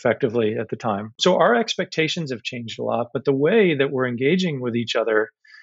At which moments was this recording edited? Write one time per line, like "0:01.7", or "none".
0:01.1